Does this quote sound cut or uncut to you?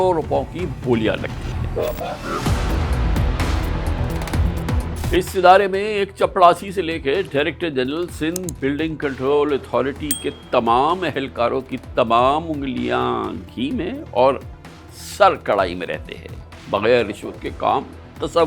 uncut